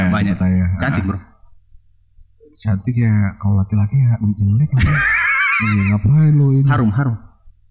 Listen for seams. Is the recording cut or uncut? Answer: uncut